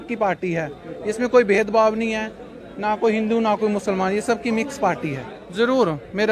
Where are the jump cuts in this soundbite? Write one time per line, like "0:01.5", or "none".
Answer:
0:05.4